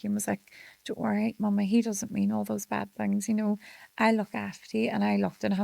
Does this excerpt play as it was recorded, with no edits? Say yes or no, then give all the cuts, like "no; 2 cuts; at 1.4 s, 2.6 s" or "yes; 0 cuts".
yes; 0 cuts